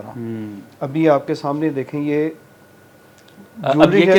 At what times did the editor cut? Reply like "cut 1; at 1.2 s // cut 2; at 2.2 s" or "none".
none